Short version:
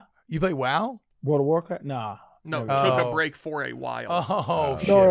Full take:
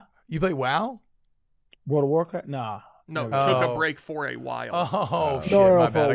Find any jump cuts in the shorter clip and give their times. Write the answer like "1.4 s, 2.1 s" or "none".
1.1 s